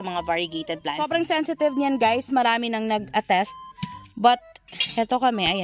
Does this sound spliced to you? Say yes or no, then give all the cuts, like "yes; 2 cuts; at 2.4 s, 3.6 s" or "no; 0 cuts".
yes; 1 cut; at 1.1 s